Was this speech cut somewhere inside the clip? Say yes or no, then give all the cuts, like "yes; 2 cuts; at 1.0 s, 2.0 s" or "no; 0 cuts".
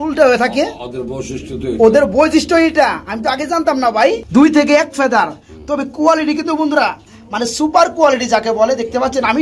yes; 1 cut; at 4.2 s